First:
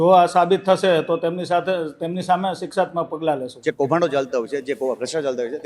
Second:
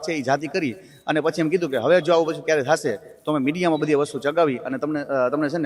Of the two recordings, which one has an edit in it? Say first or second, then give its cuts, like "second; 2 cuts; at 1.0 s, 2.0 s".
first; 1 cut; at 3.5 s